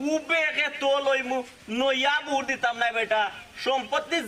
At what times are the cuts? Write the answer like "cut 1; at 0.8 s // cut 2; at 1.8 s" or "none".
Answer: none